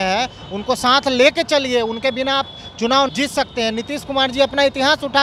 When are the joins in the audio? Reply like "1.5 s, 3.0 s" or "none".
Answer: 3.1 s